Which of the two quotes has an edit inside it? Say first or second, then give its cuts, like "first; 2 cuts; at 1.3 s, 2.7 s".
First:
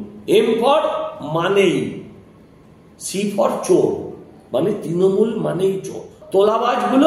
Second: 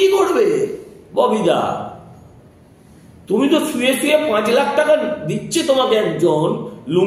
first; 1 cut; at 6.2 s